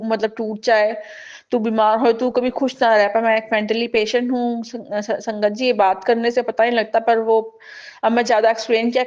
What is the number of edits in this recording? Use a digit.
0